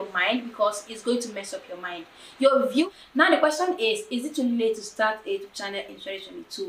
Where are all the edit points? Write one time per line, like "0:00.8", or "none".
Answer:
0:02.9